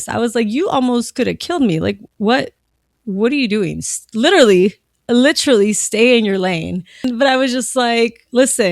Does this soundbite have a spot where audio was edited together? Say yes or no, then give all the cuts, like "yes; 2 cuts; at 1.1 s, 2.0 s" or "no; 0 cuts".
yes; 1 cut; at 7.0 s